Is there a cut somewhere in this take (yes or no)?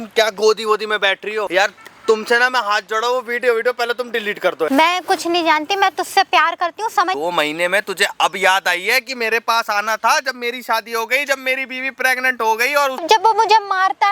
yes